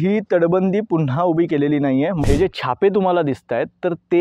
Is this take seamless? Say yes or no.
no